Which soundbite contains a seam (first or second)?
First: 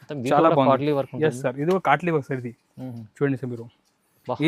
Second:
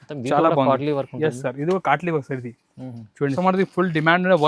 second